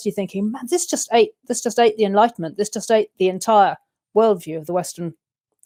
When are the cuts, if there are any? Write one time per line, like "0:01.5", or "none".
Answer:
none